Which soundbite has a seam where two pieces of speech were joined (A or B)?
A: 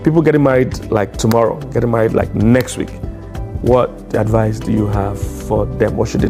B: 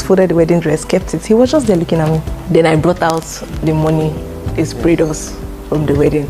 B